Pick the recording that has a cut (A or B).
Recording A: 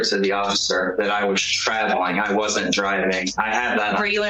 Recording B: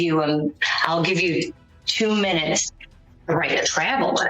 B